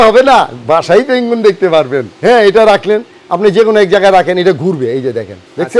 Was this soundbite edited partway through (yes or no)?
yes